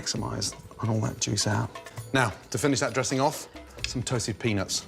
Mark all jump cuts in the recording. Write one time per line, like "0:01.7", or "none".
0:01.8